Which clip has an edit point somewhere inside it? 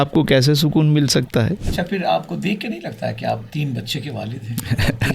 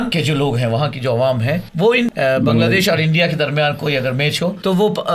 first; 1 cut; at 1.6 s

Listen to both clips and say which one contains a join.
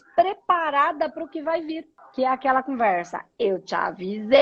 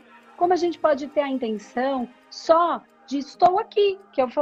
first; 1 cut; at 2.0 s

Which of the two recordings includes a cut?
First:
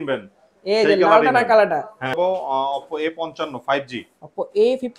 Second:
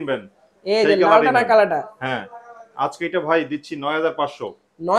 first; 1 cut; at 2.1 s

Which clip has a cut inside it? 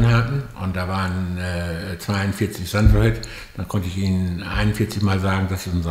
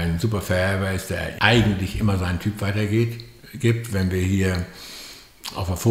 second; 1 cut; at 1.3 s

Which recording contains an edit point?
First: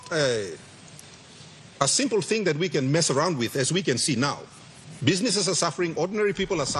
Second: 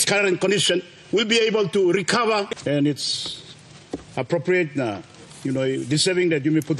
second; 1 cut; at 2.5 s

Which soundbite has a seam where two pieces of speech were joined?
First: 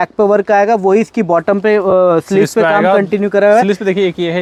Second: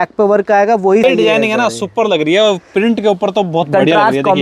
second; 1 cut; at 1.0 s

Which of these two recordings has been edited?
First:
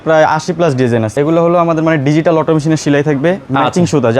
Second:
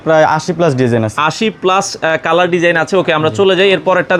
first; 1 cut; at 1.1 s

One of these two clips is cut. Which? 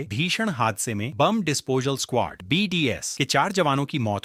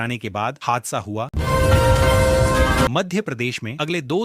second; 2 cuts; at 1.3 s, 2.9 s

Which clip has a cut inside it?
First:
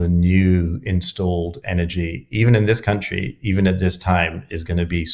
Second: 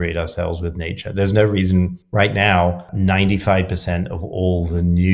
second; 2 cuts; at 2.0 s, 2.9 s

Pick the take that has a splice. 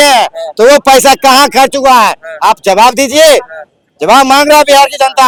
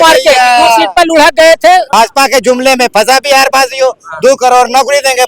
second; 1 cut; at 1.9 s

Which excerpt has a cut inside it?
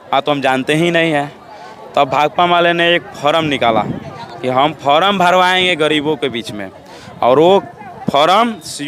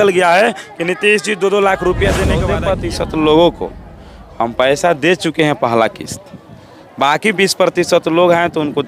second; 1 cut; at 2.5 s

